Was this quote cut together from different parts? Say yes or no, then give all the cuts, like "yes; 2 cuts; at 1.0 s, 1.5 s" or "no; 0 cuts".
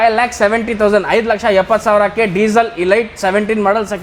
no; 0 cuts